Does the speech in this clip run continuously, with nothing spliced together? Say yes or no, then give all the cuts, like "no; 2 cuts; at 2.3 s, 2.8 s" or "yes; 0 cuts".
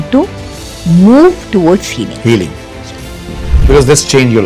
yes; 0 cuts